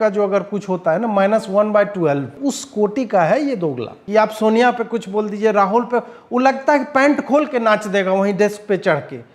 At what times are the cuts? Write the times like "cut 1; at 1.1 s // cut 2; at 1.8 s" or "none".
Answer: cut 1; at 2.3 s // cut 2; at 3.9 s

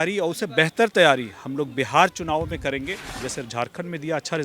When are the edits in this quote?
cut 1; at 3.3 s

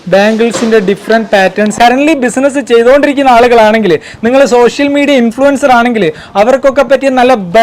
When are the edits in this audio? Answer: cut 1; at 1.7 s

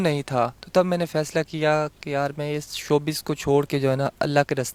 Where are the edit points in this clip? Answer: none

